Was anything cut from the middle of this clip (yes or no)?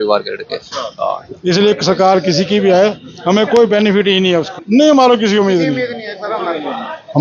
yes